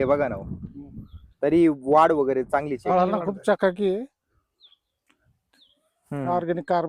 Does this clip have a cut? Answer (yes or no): yes